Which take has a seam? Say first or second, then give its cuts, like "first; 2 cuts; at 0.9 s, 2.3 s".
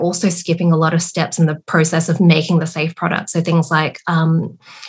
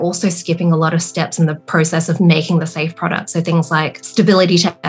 second; 1 cut; at 4.0 s